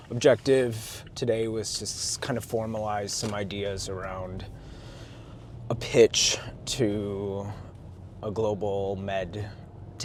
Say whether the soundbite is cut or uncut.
uncut